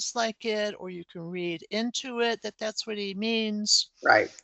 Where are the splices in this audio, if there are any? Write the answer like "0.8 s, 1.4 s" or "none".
none